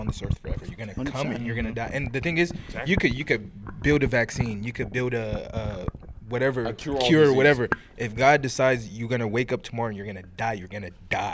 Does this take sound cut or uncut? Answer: uncut